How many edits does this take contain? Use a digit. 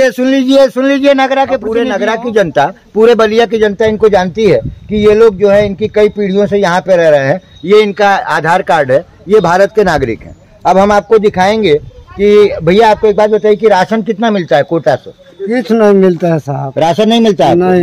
1